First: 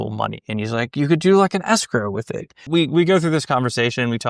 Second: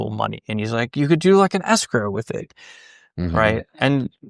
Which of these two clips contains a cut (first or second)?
first